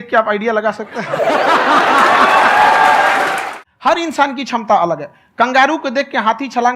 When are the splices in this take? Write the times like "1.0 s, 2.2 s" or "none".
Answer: 3.6 s